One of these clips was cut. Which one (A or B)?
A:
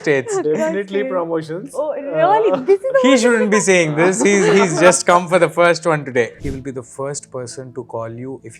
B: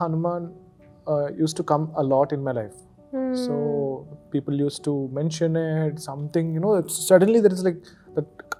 A